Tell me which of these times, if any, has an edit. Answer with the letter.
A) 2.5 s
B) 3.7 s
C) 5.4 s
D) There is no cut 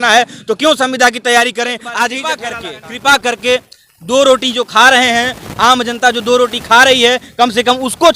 A